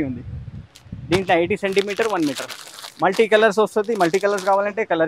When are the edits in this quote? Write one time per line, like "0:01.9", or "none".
none